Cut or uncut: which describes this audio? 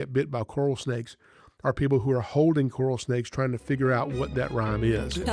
uncut